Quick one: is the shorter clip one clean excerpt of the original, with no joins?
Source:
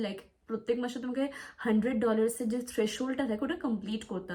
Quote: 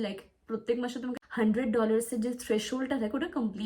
no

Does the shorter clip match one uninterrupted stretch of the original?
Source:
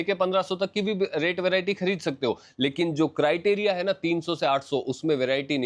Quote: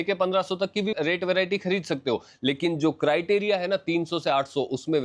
no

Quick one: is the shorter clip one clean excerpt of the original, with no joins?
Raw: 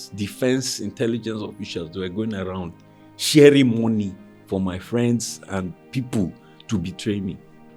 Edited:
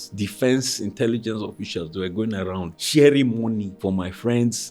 no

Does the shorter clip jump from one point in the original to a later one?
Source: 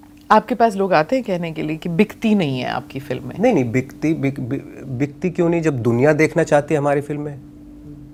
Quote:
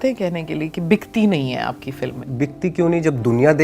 yes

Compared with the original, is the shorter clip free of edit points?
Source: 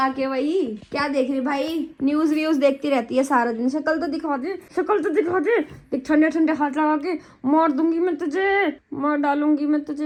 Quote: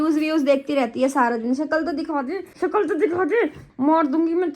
no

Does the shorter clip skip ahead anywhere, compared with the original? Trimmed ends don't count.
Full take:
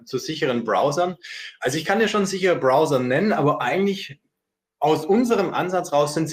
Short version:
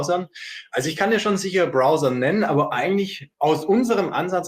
yes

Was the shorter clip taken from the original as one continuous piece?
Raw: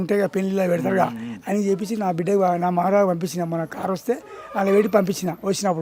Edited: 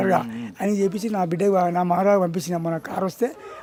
yes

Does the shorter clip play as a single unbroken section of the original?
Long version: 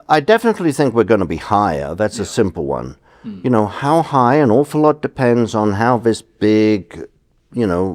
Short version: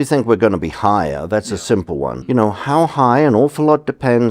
no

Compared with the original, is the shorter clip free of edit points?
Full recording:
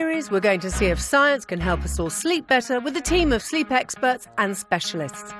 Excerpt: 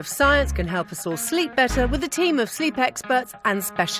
yes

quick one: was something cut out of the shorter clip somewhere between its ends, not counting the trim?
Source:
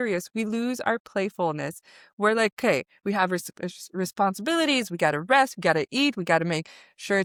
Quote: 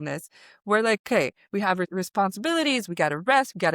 yes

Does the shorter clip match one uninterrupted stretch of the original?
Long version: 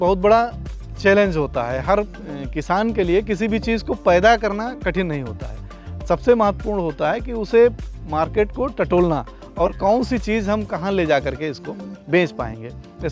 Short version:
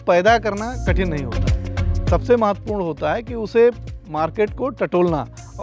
yes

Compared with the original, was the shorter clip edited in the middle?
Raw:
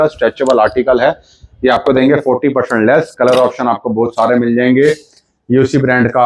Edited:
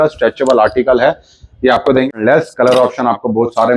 yes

